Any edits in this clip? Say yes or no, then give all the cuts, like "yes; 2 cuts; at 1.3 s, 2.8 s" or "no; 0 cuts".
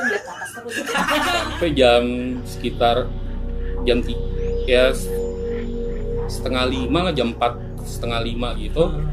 yes; 1 cut; at 1.4 s